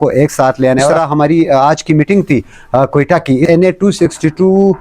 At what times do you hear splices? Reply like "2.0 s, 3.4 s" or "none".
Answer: 0.9 s, 3.5 s